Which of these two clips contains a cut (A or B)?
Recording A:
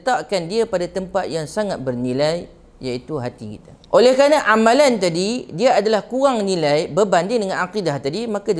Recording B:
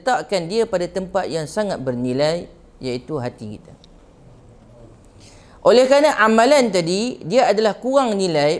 A